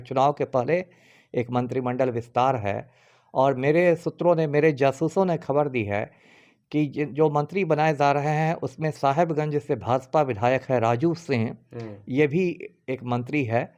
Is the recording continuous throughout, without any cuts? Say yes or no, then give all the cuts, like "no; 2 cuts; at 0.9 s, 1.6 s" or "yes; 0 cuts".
yes; 0 cuts